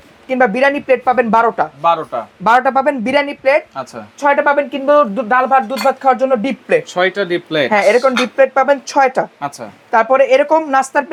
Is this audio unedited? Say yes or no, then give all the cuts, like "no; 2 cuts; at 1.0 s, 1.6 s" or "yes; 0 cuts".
yes; 0 cuts